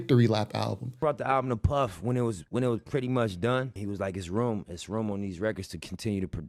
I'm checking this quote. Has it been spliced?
no; 0 cuts

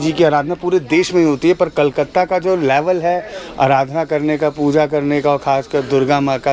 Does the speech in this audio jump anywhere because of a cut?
no; 0 cuts

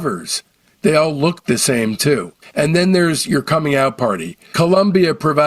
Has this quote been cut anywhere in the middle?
yes; 1 cut; at 4.5 s

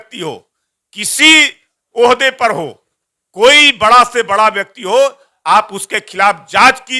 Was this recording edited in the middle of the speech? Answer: no; 0 cuts

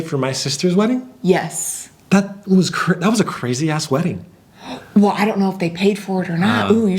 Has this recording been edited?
no; 0 cuts

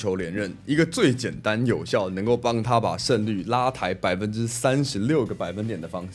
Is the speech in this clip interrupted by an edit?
no; 0 cuts

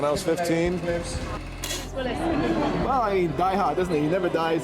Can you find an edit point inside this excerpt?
yes; 1 cut; at 1.4 s

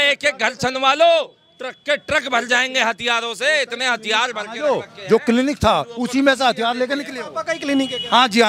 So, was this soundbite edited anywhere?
no; 0 cuts

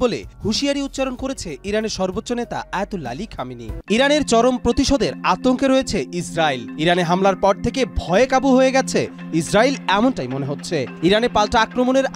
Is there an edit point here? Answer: yes; 1 cut; at 3.7 s

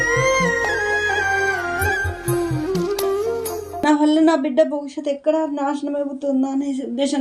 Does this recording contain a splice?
yes; 1 cut; at 3.8 s

